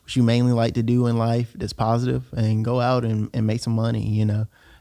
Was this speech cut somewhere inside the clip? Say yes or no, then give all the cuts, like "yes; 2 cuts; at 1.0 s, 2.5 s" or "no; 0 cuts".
no; 0 cuts